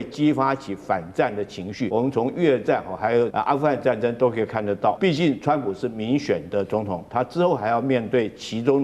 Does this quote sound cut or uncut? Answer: cut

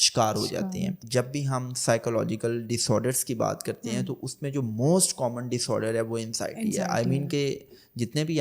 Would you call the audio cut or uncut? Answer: cut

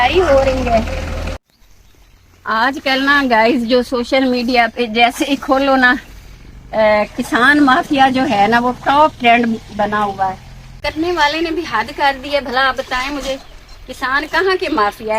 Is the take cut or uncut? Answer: cut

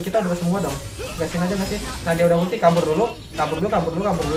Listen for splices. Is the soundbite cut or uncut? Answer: uncut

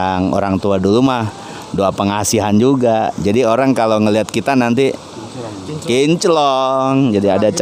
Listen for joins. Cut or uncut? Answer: uncut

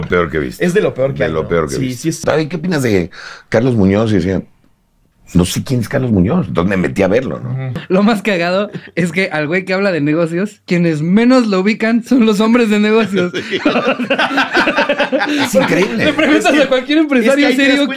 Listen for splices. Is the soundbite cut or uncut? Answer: cut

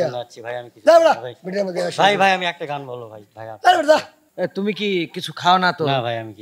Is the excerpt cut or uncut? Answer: cut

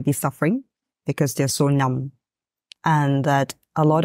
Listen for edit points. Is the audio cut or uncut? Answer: uncut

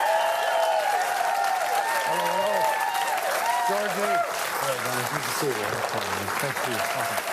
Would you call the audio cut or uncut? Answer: cut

